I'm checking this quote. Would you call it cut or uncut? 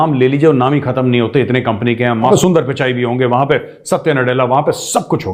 cut